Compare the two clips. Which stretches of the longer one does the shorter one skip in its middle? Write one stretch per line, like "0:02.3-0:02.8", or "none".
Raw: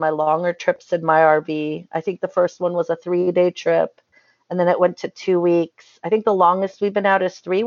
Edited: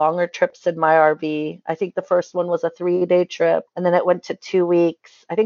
0:04.0-0:04.4